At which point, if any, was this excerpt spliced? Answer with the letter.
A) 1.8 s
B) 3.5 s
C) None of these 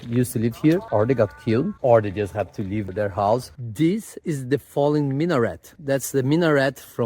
B